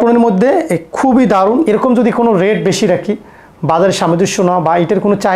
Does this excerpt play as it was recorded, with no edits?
no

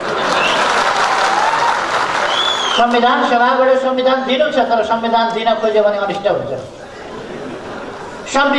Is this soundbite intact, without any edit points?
no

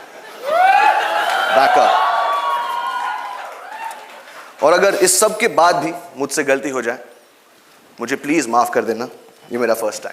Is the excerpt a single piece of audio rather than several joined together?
yes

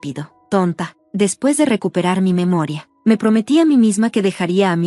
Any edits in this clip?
yes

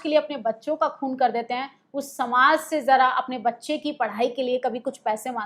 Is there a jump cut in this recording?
no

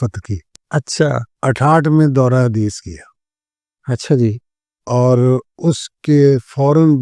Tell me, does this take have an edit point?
yes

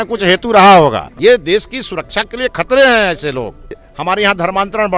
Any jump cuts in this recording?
yes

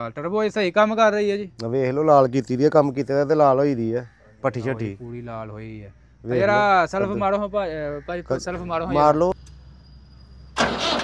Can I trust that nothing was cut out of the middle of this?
no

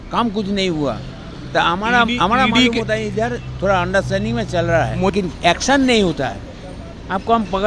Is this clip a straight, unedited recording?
no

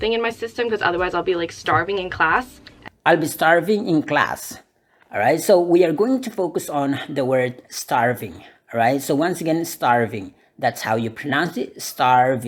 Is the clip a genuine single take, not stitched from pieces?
yes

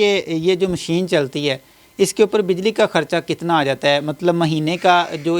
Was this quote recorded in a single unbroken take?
yes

